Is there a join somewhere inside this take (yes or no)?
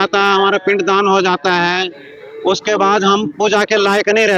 no